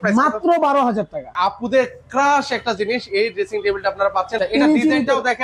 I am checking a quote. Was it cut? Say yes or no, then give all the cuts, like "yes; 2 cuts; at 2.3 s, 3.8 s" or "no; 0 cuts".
yes; 2 cuts; at 1.3 s, 4.4 s